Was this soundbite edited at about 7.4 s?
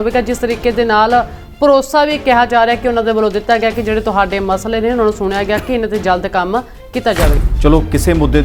yes; 1 cut; at 7.4 s

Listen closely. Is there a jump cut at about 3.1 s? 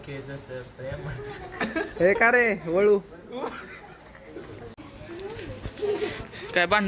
no; 1 cut; at 4.8 s

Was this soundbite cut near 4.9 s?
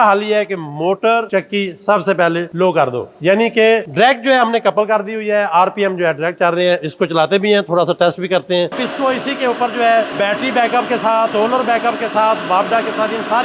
no; 3 cuts; at 8.7 s, 10.1 s, 11.3 s

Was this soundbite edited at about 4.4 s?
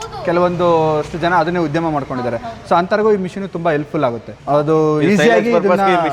no; 0 cuts

